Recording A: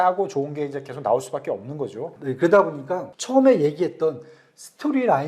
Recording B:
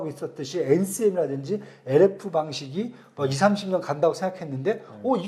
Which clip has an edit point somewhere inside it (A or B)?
A